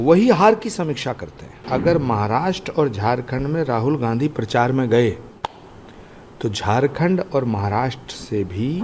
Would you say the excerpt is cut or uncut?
cut